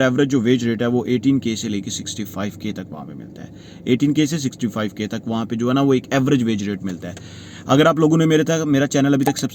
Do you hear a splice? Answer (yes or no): no